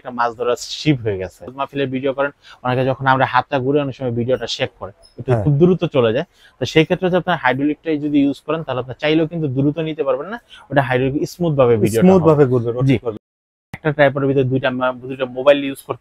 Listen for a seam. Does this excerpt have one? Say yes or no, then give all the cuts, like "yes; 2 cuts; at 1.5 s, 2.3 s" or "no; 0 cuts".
yes; 2 cuts; at 1.5 s, 13.3 s